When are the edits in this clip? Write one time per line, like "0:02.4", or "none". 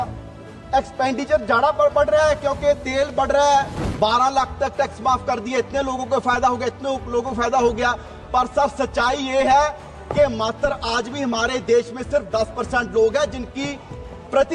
0:03.8